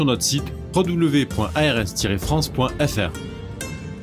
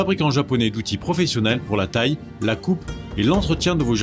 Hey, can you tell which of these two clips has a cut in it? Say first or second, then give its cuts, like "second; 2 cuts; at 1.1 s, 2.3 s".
first; 1 cut; at 3.1 s